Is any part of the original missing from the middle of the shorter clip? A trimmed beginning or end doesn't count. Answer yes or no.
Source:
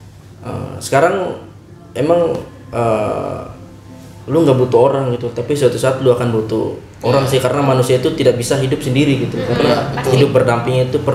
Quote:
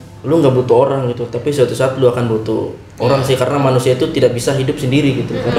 no